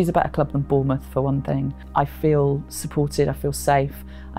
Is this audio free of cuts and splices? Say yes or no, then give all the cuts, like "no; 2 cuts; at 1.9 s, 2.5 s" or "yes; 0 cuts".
no; 1 cut; at 1.8 s